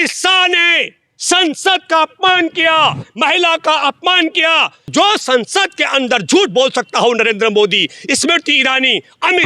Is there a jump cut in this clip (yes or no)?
yes